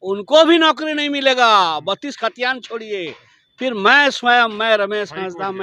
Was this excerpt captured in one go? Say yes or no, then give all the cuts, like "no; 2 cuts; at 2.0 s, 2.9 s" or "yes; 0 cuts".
yes; 0 cuts